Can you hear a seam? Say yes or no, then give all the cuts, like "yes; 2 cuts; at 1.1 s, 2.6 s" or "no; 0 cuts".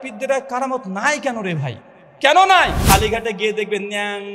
yes; 1 cut; at 2.8 s